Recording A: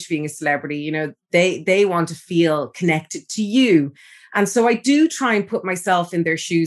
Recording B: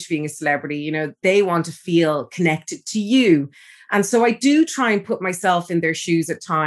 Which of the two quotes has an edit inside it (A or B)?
B